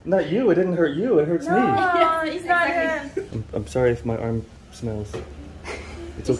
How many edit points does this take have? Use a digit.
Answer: 1